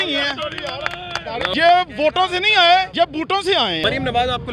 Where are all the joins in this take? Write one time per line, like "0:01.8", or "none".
0:01.5
0:03.3